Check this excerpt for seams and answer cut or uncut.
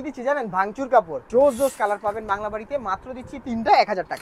cut